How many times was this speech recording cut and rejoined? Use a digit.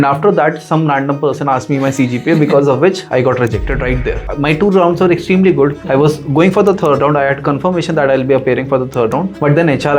1